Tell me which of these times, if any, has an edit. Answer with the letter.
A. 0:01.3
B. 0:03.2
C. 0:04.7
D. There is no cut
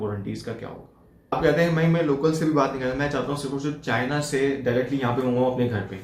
A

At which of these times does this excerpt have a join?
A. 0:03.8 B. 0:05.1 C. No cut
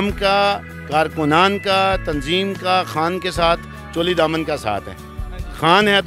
C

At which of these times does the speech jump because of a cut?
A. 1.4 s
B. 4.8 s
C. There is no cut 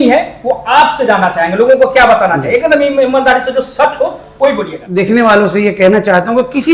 B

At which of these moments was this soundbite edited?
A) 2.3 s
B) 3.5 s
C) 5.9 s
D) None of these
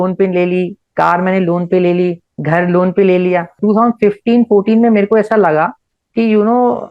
B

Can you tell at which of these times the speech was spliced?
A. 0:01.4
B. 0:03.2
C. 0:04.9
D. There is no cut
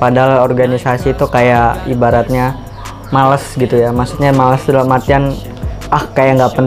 D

